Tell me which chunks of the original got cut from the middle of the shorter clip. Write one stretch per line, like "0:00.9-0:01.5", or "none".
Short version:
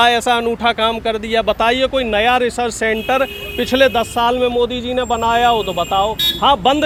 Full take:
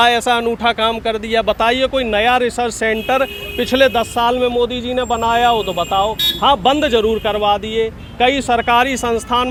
none